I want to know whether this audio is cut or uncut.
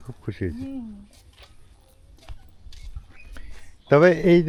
uncut